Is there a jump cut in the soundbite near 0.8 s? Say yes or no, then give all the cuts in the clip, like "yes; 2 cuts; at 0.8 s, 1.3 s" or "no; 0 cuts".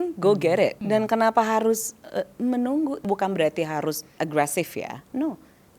yes; 3 cuts; at 0.8 s, 3.0 s, 4.1 s